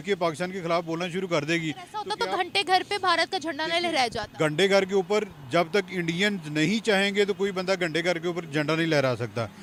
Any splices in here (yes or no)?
no